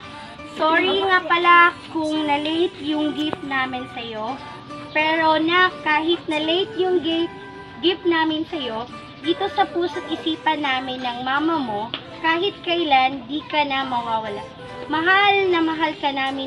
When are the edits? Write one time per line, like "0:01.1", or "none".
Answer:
none